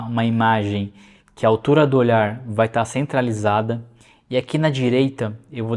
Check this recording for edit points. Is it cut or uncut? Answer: uncut